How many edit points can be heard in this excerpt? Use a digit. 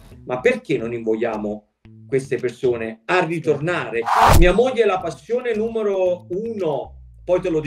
1